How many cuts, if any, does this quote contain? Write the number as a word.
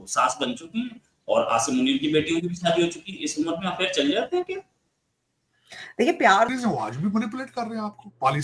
one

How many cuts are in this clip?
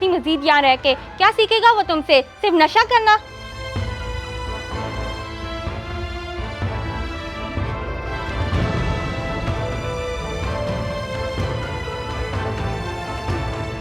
one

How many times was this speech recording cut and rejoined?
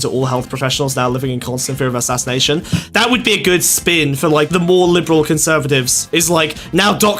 three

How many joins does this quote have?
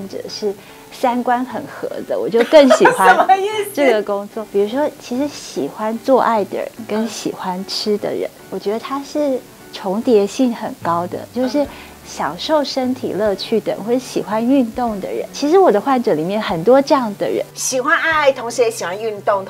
four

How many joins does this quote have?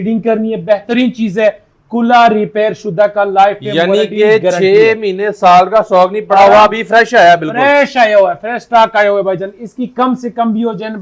zero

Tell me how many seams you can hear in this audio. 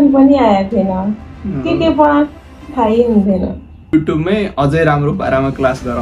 one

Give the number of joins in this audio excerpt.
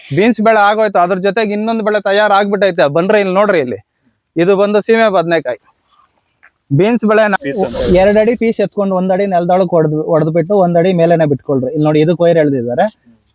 one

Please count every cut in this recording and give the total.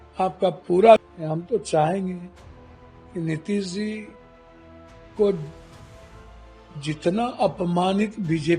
one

